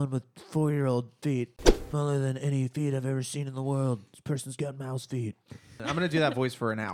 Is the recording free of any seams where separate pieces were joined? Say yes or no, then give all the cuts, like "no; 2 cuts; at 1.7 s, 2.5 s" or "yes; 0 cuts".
no; 2 cuts; at 1.7 s, 5.8 s